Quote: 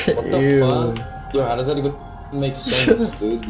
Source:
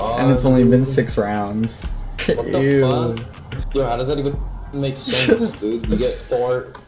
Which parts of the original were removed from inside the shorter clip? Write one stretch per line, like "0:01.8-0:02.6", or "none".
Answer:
0:03.3-0:03.5